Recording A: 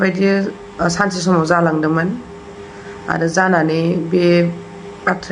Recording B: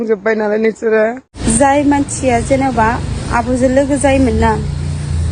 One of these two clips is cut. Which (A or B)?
B